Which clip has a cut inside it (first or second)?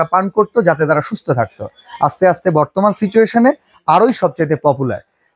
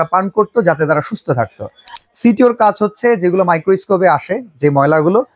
second